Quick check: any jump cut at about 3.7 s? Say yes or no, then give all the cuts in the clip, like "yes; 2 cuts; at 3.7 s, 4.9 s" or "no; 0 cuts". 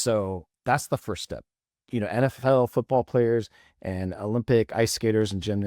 no; 1 cut; at 1.8 s